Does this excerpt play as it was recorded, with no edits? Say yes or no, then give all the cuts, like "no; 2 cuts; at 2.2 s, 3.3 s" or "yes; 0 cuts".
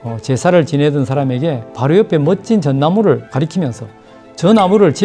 no; 2 cuts; at 1.7 s, 3.3 s